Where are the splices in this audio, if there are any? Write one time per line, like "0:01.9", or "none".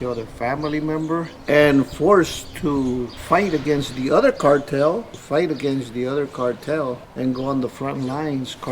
0:01.3
0:03.1
0:05.2
0:07.1